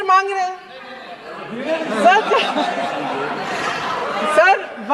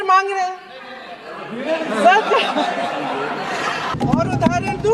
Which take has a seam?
second; 1 cut; at 3.9 s

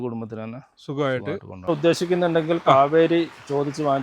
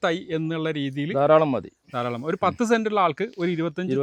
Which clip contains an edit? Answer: first; 1 cut; at 1.7 s

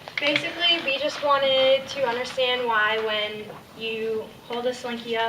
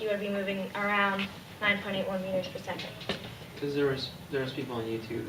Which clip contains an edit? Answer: first; 1 cut; at 1.5 s

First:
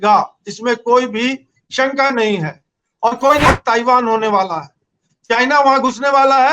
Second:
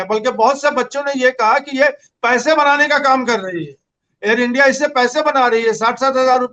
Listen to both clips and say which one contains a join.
first; 1 cut; at 3.5 s

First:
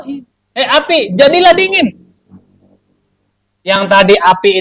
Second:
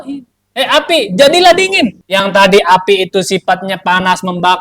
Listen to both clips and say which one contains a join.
second; 1 cut; at 2.0 s

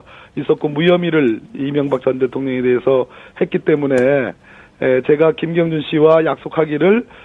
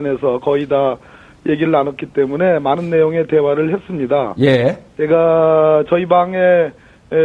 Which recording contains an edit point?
second; 1 cut; at 5.8 s

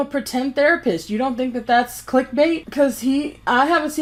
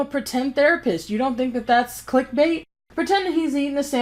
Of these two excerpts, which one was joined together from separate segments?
second; 1 cut; at 2.7 s

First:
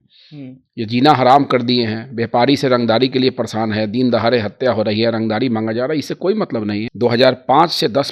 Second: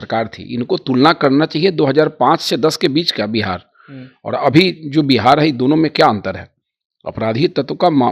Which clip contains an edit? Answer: first; 1 cut; at 6.9 s

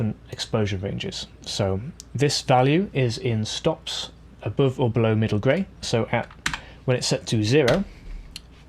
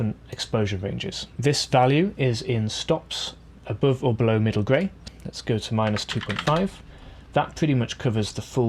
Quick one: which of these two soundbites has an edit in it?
second; 2 cuts; at 1.2 s, 5.0 s

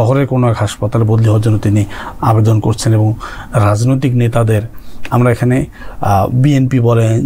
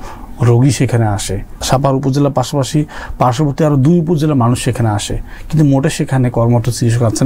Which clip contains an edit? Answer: second; 1 cut; at 1.6 s

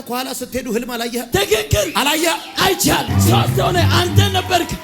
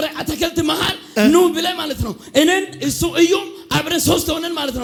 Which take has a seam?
first; 2 cuts; at 1.2 s, 3.1 s

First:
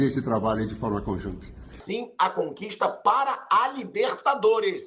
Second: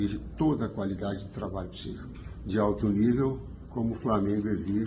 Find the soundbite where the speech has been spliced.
first; 1 cut; at 1.8 s

